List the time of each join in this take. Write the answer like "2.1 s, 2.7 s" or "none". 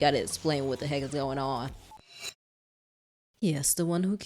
2.0 s